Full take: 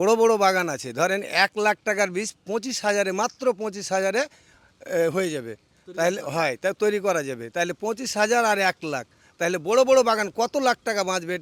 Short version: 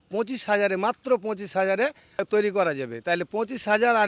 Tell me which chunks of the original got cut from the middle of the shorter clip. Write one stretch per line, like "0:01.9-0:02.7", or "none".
0:04.6-0:06.7

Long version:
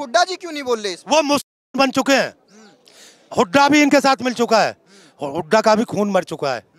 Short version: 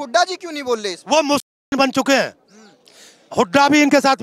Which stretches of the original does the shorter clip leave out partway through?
none

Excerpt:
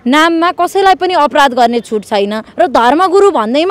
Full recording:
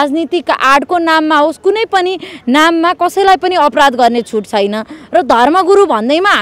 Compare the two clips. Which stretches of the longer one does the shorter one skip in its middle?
0:04.8-0:05.0

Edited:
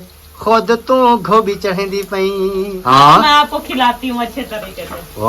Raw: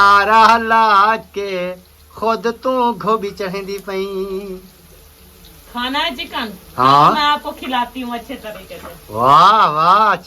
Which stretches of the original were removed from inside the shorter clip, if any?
0:04.5-0:06.7

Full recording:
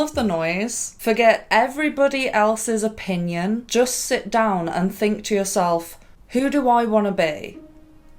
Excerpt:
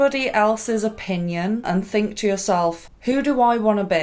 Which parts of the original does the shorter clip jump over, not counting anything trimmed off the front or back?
0:03.6-0:04.7
0:06.0-0:06.2

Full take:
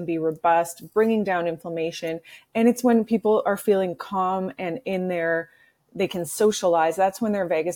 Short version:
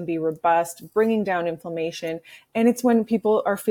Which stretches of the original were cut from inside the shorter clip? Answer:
none

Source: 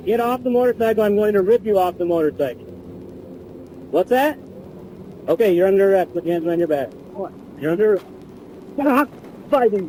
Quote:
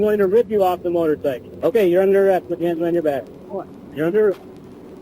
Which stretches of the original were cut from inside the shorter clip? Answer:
0:02.6-0:05.1

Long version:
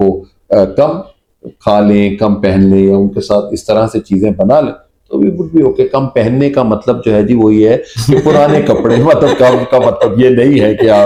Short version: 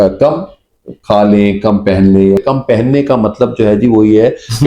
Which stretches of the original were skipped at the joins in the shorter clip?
0:02.9-0:05.9

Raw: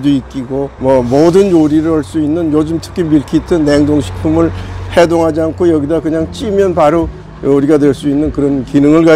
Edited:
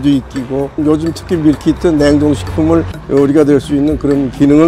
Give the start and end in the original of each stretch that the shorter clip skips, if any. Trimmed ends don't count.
0:00.8-0:02.4
0:04.6-0:07.3

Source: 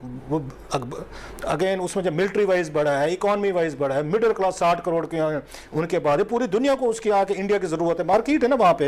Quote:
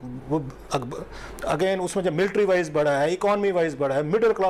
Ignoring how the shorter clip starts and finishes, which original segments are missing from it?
none

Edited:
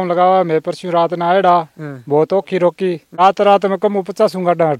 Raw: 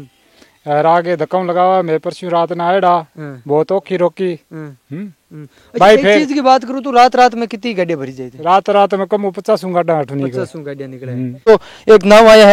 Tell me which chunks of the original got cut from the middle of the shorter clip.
0:04.4-0:08.3

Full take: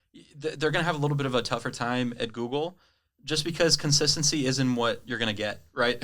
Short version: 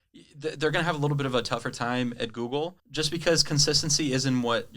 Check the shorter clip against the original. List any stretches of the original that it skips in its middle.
0:02.8-0:03.2

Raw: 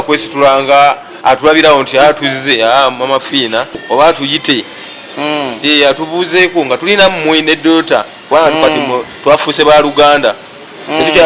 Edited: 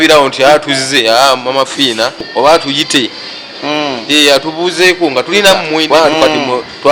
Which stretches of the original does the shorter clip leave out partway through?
0:07.4-0:08.3

